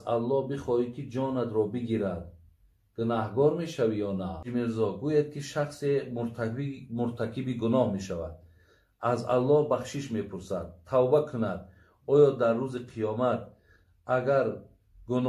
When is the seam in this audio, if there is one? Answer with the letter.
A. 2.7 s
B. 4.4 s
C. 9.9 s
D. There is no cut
B